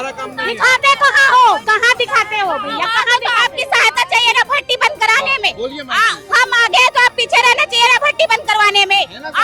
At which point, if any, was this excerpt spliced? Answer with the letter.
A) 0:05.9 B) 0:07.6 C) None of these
C